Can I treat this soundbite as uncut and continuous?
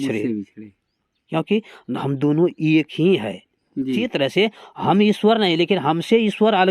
no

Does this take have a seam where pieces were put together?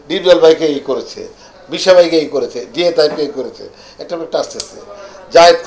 no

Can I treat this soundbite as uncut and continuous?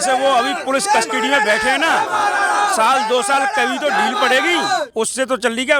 yes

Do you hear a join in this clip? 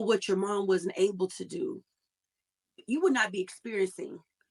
no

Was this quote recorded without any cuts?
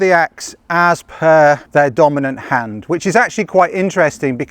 no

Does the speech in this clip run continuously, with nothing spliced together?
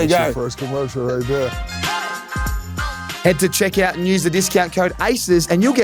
yes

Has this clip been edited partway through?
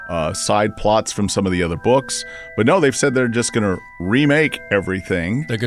no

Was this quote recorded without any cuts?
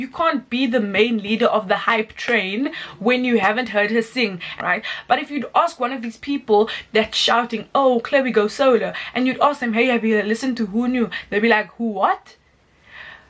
no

